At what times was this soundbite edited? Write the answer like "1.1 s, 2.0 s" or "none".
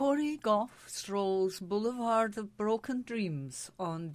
none